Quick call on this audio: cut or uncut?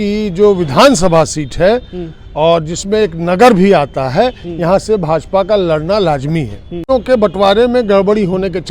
cut